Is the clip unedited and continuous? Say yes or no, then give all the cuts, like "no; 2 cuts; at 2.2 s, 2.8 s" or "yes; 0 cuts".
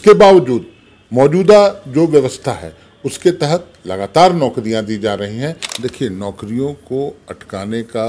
no; 1 cut; at 5.6 s